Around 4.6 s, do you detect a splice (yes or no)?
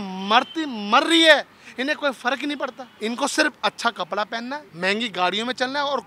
yes